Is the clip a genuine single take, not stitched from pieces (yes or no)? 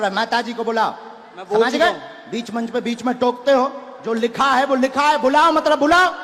yes